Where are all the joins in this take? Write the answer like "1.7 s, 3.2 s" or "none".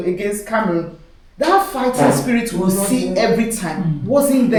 none